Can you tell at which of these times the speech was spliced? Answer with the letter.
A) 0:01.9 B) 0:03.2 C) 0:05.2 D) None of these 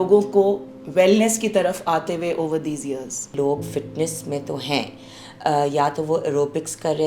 B